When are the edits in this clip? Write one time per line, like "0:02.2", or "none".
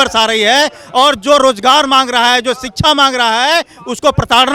none